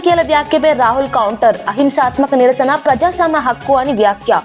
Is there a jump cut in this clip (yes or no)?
no